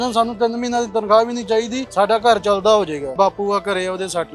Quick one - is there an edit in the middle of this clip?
yes; 2 cuts; at 1.8 s, 3.1 s

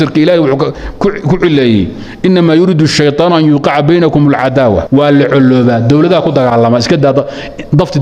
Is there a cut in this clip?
yes; 1 cut; at 4.8 s

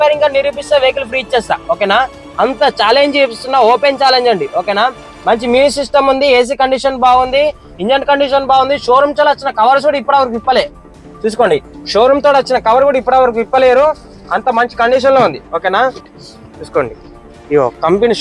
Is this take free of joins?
no; 1 cut; at 16.0 s

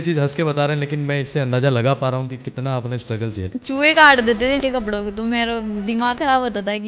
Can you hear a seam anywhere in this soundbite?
yes; 2 cuts; at 3.4 s, 4.6 s

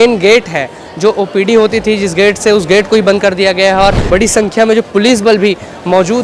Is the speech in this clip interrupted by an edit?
yes; 1 cut; at 4.1 s

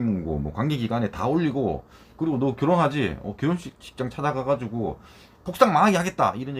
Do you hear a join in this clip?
no; 0 cuts

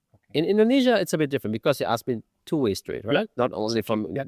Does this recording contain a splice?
no; 0 cuts

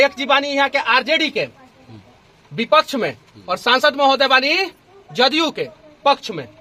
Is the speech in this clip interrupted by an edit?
no; 0 cuts

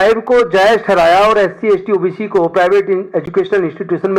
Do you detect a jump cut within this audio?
no; 0 cuts

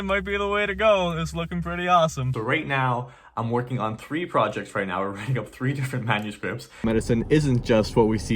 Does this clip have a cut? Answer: yes; 2 cuts; at 2.3 s, 6.8 s

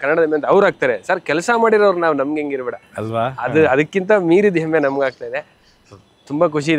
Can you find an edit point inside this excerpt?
no; 0 cuts

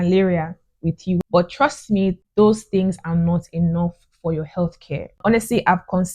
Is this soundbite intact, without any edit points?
no; 3 cuts; at 1.2 s, 2.2 s, 5.1 s

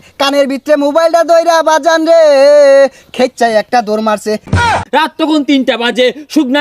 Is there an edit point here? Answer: yes; 1 cut; at 4.7 s

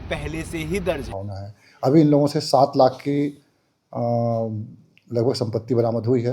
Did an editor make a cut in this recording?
yes; 1 cut; at 1.1 s

